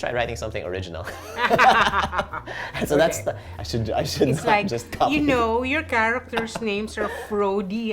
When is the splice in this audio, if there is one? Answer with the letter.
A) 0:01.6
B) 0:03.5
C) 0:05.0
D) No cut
B